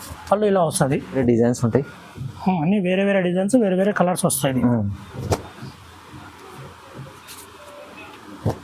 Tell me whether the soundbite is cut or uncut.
cut